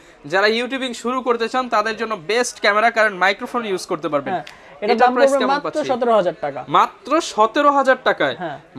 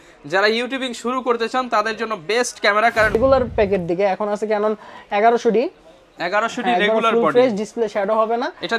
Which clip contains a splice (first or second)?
second